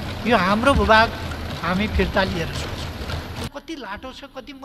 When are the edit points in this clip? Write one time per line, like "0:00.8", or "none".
0:03.5

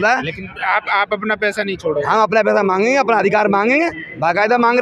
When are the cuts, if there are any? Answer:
none

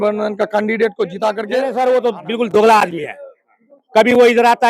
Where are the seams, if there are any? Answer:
0:01.7

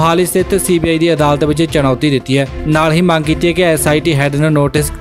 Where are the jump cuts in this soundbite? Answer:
none

